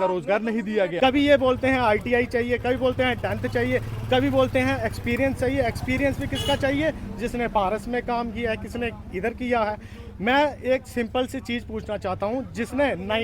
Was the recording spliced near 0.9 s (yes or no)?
yes